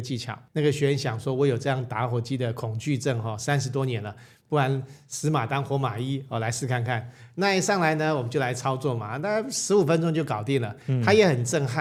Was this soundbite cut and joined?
no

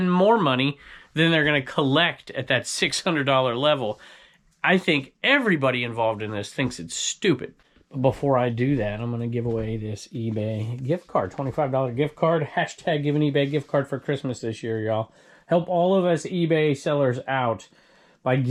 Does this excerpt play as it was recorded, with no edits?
yes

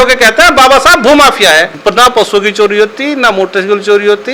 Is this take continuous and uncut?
no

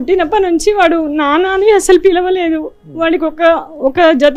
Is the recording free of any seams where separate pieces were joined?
yes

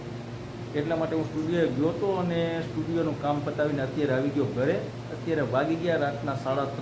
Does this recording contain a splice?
no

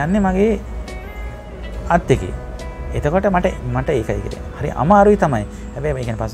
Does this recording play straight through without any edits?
yes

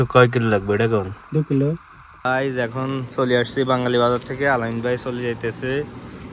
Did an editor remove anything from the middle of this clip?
yes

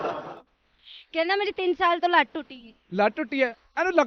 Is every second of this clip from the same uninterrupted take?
yes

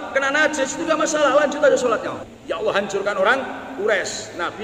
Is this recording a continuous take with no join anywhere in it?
no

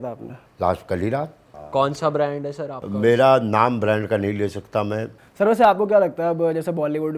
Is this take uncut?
no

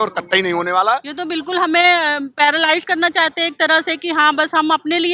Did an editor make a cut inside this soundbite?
yes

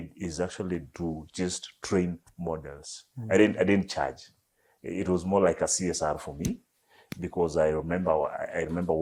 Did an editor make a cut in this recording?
no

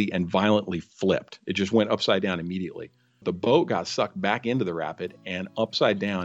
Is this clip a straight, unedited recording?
no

